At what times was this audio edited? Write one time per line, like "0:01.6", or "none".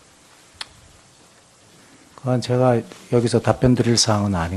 none